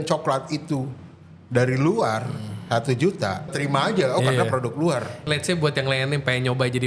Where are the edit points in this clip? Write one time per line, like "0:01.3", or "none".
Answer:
0:03.6
0:05.2